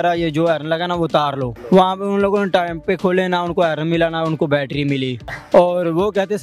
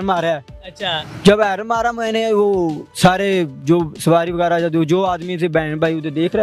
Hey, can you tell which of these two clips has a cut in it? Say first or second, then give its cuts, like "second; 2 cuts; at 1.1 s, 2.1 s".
first; 2 cuts; at 1.5 s, 5.4 s